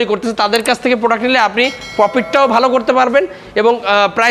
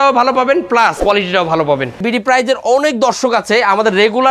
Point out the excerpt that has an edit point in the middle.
second; 2 cuts; at 1.0 s, 2.0 s

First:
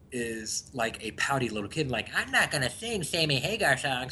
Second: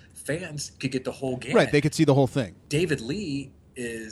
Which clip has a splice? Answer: second; 1 cut; at 2.6 s

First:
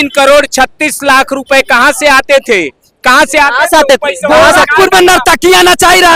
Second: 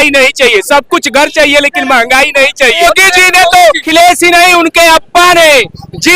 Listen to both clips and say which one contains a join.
second; 2 cuts; at 2.8 s, 3.9 s

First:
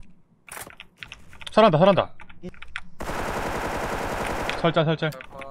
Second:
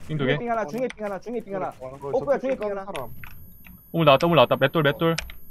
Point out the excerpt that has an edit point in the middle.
first; 1 cut; at 2.4 s

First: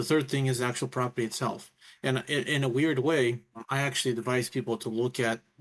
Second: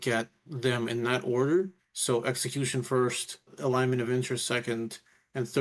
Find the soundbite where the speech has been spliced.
second; 2 cuts; at 1.9 s, 3.5 s

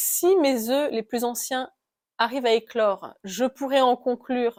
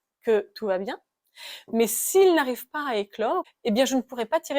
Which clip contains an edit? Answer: second; 1 cut; at 3.5 s

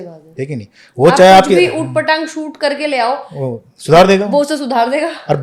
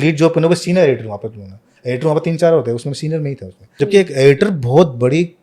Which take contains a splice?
second; 1 cut; at 3.8 s

